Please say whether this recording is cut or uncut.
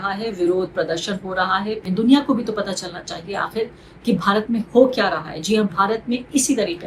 cut